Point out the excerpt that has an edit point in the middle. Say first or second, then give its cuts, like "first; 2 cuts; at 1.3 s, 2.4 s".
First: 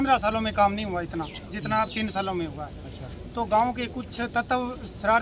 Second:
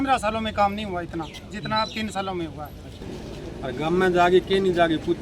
second; 1 cut; at 3.2 s